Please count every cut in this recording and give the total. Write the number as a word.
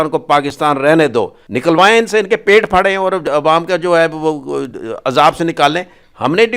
one